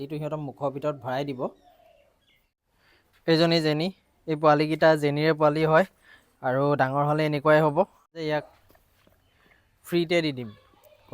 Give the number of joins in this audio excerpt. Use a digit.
2